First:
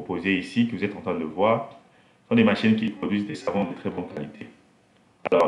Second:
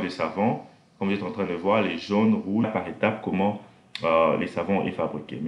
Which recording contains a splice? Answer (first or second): second